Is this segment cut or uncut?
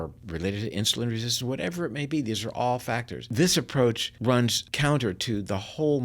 cut